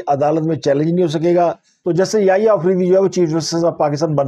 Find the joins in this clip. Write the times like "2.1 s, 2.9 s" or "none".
1.7 s